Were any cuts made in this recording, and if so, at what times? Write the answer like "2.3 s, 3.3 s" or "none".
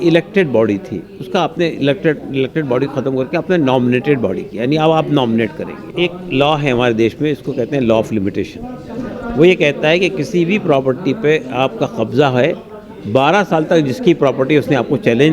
5.8 s

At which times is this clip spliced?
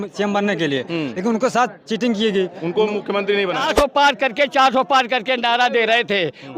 3.7 s

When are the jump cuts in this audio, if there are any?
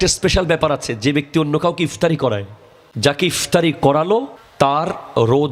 2.2 s, 4.4 s

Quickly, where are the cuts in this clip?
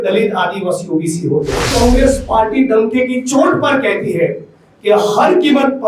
1.7 s

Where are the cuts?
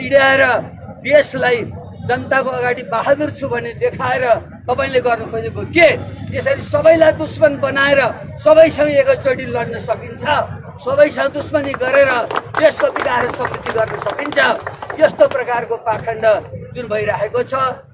none

